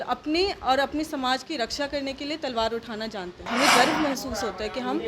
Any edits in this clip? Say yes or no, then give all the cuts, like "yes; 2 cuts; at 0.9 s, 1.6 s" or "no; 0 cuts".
yes; 1 cut; at 3.5 s